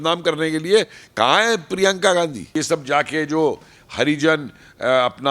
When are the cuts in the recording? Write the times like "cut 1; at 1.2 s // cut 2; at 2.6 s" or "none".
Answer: cut 1; at 2.5 s